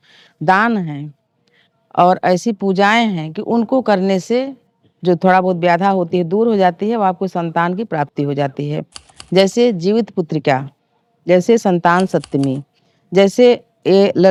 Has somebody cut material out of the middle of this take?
no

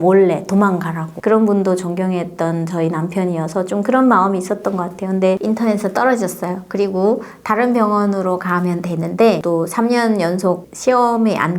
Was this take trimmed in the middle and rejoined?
yes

